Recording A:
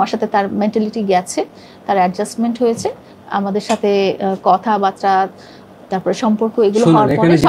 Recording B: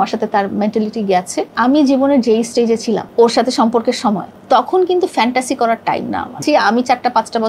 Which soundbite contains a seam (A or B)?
B